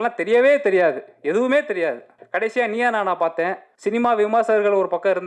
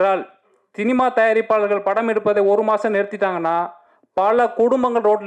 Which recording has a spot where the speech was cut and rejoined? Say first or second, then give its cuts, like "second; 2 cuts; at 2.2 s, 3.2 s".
first; 2 cuts; at 2.1 s, 3.7 s